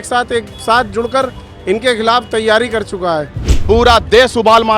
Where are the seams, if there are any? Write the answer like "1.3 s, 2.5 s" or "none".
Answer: 3.5 s